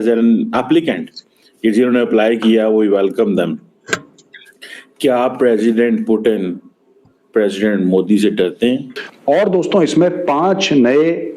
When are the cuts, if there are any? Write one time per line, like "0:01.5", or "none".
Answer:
0:09.0